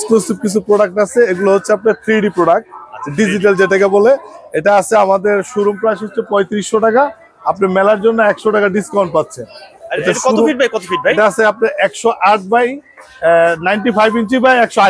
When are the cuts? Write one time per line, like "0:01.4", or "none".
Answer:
none